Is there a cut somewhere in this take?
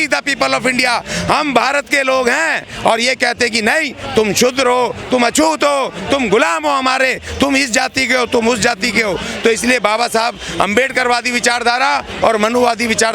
no; 0 cuts

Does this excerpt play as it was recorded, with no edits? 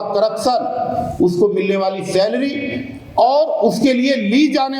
yes; 0 cuts

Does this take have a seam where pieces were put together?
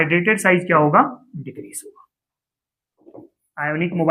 yes; 1 cut; at 3.1 s

